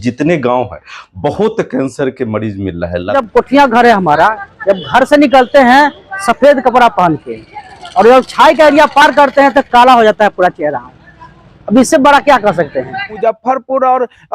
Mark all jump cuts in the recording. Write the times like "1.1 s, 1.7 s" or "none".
3.1 s, 13.2 s

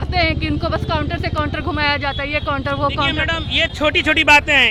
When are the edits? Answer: none

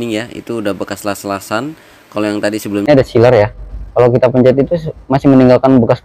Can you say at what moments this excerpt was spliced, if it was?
2.8 s

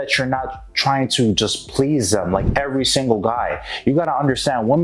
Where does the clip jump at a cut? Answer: none

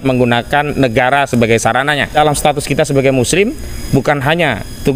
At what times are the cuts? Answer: 2.1 s

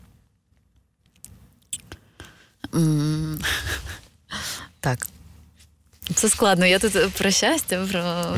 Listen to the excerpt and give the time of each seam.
none

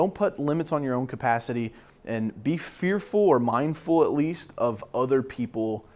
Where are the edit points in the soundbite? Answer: none

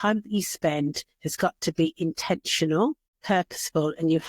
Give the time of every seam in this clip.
3.1 s

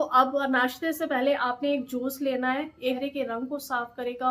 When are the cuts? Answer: 3.0 s

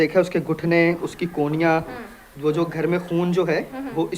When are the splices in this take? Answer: none

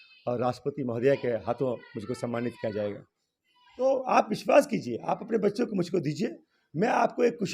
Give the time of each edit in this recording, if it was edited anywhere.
3.8 s

